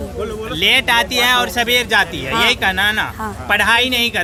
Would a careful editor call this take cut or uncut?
uncut